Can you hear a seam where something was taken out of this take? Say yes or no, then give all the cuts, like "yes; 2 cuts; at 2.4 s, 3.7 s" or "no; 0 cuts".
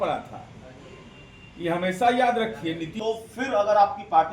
yes; 1 cut; at 2.9 s